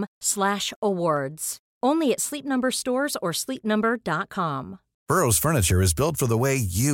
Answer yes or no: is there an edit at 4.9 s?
yes